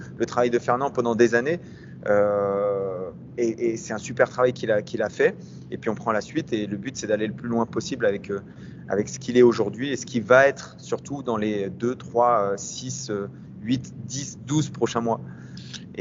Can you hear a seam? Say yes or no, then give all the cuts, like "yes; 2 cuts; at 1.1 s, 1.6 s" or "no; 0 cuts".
no; 0 cuts